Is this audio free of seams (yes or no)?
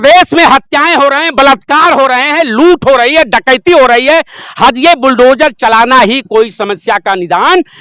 yes